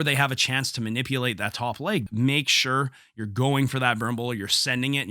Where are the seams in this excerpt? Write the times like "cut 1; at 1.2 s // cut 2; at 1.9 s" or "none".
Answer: cut 1; at 2.1 s